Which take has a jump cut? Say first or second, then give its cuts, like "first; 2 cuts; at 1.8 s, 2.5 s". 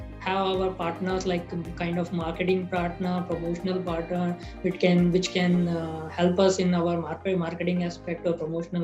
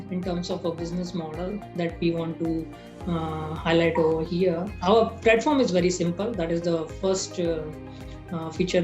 second; 1 cut; at 4.7 s